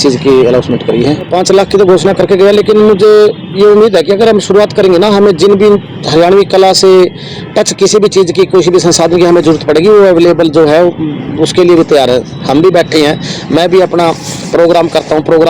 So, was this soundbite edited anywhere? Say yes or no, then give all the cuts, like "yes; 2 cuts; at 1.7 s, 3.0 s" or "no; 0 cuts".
yes; 2 cuts; at 1.3 s, 12.3 s